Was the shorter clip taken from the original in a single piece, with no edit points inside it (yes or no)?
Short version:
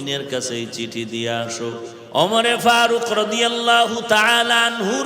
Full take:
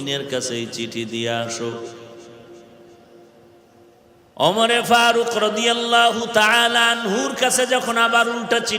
no